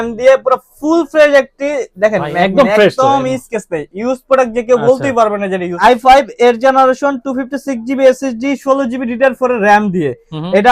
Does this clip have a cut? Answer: yes; 1 cut; at 5.7 s

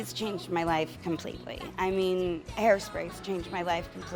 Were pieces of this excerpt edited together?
no; 0 cuts

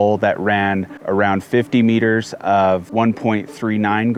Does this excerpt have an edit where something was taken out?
no; 0 cuts

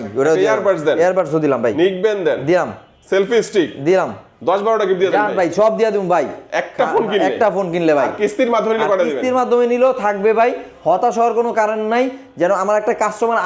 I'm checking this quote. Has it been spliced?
no; 0 cuts

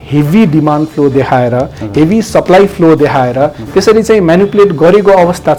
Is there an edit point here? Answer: no; 0 cuts

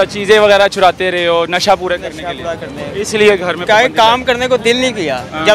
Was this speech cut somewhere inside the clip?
no; 0 cuts

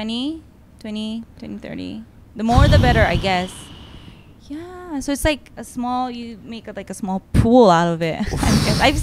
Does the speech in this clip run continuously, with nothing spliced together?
yes; 0 cuts

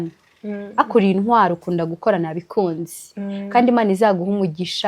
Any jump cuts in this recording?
no; 0 cuts

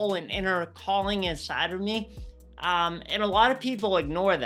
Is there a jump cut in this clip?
no; 0 cuts

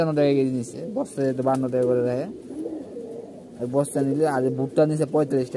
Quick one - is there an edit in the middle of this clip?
no; 0 cuts

